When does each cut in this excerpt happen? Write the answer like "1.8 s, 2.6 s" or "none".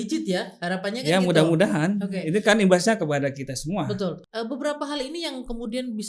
4.2 s

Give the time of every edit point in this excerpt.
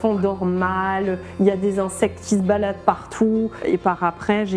3.5 s

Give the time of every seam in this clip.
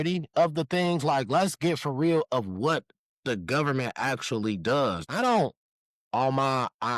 5.0 s

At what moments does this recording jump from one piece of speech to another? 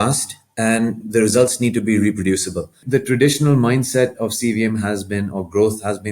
1.1 s, 2.8 s

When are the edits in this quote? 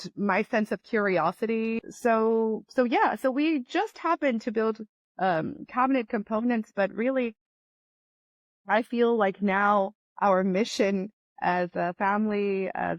1.8 s

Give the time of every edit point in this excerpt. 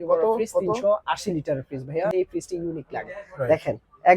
2.1 s

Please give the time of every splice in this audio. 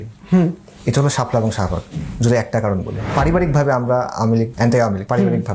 3.0 s, 4.8 s

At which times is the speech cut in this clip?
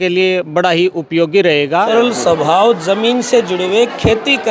1.9 s

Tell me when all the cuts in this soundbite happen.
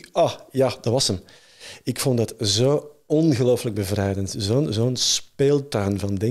none

